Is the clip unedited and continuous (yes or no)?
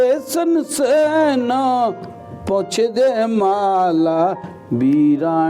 yes